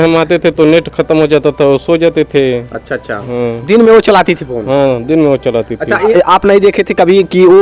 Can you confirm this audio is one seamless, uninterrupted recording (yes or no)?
yes